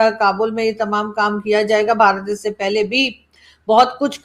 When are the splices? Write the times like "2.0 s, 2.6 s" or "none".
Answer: none